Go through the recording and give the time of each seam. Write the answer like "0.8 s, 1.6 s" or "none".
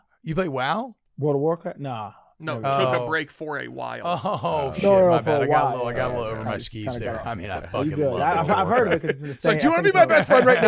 1.0 s